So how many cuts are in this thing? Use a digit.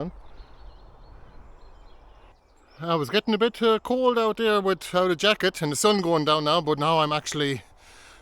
1